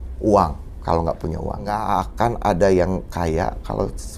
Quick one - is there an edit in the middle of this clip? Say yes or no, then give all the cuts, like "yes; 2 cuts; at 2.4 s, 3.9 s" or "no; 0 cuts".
yes; 1 cut; at 1.8 s